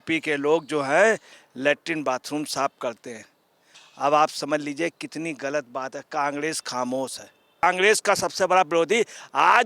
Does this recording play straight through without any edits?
no; 1 cut; at 7.6 s

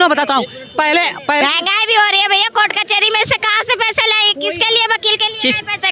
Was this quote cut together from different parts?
yes; 1 cut; at 1.4 s

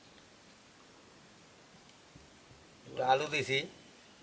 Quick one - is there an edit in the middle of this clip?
no; 0 cuts

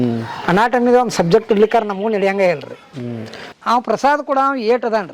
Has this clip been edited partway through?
yes; 1 cut; at 3.4 s

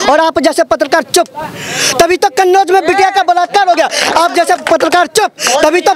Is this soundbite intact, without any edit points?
no; 1 cut; at 4.6 s

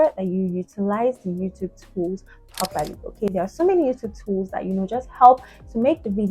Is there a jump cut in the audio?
no; 0 cuts

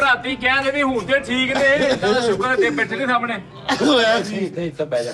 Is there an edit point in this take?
no; 0 cuts

